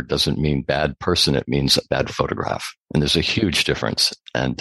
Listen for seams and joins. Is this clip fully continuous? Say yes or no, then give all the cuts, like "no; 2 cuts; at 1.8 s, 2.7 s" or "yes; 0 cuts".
yes; 0 cuts